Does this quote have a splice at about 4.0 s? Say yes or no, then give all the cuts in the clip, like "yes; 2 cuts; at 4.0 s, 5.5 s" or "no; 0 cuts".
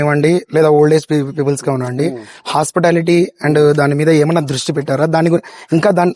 no; 0 cuts